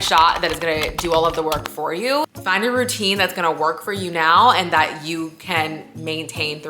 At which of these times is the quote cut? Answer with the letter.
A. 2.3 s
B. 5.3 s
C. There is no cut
A